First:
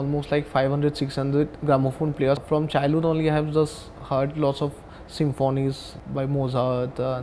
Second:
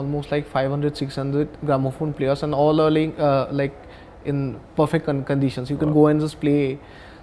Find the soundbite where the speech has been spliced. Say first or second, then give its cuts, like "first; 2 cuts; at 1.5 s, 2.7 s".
first; 2 cuts; at 2.4 s, 5.9 s